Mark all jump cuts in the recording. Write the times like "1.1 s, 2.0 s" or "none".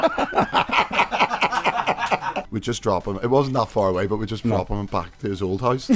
2.4 s